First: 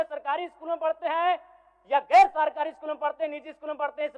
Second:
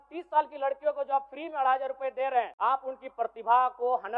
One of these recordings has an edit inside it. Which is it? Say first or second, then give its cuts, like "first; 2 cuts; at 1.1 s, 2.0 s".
second; 1 cut; at 2.5 s